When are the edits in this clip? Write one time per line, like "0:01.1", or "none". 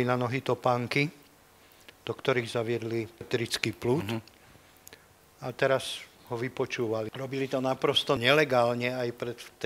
0:03.3
0:07.1
0:08.2